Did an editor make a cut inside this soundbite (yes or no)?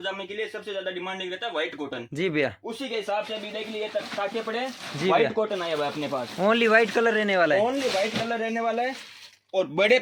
no